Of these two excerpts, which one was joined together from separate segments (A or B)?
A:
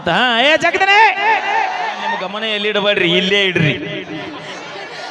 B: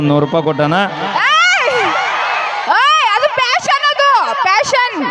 A